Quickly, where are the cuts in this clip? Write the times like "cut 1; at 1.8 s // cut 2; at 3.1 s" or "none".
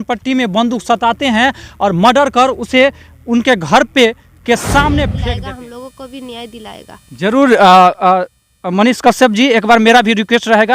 cut 1; at 5.3 s